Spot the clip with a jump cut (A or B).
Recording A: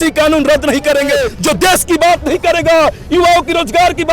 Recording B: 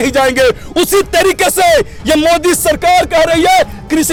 A